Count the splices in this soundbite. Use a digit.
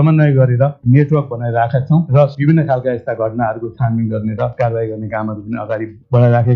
2